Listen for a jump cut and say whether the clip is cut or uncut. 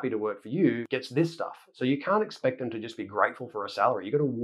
uncut